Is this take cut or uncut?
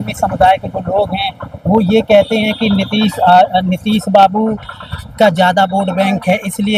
uncut